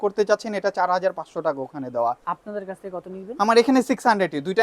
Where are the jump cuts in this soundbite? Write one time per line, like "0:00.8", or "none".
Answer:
0:02.3

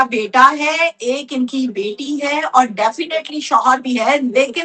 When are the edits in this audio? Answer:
none

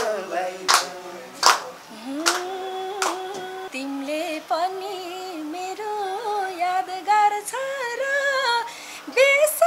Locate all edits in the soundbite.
0:03.7

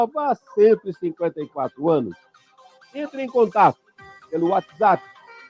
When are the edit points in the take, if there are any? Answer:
none

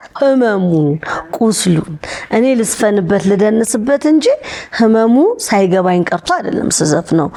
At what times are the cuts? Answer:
none

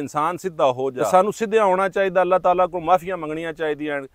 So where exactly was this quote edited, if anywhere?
0:01.0

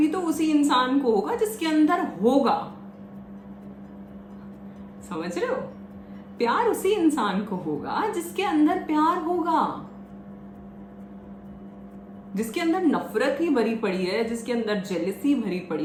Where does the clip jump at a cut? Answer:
none

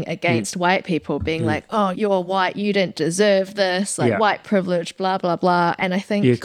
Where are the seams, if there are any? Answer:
0:01.9

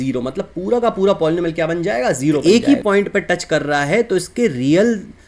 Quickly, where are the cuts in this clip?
0:02.4

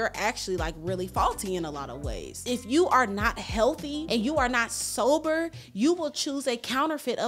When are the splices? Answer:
0:02.4
0:04.0

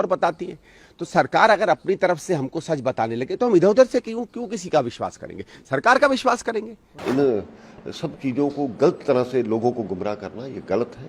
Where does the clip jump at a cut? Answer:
0:07.0

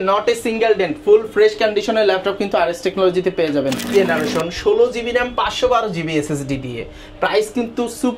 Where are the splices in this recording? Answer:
0:03.9

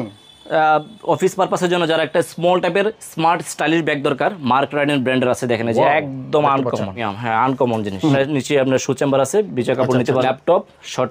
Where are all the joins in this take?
0:07.1
0:08.1
0:10.2

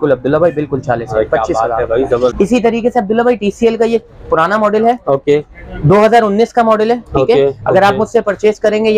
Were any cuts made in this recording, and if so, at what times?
0:02.3

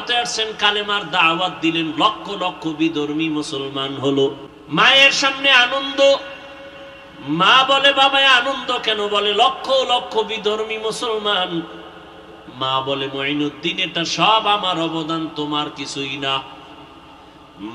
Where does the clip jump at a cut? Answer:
0:04.5

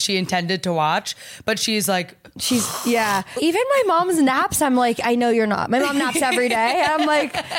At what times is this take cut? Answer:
0:03.3

